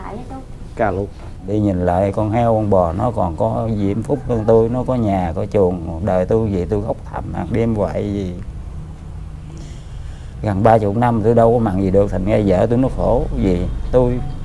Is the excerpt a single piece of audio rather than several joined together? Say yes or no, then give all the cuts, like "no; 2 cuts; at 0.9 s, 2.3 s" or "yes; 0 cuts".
no; 1 cut; at 1.5 s